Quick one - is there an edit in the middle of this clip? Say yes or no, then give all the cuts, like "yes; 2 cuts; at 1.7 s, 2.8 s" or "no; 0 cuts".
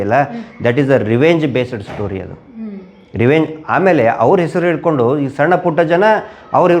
no; 0 cuts